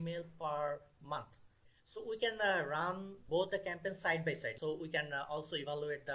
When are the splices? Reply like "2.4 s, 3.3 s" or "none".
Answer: 1.5 s, 3.2 s, 4.5 s

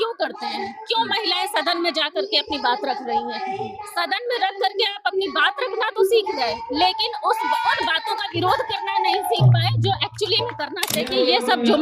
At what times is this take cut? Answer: 10.8 s

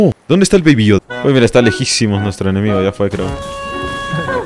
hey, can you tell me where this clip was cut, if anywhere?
1.0 s

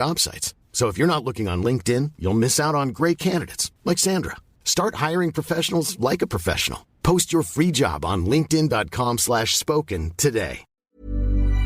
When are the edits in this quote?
10.7 s

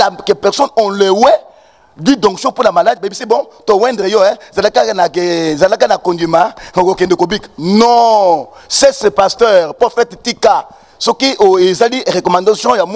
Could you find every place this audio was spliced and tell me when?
none

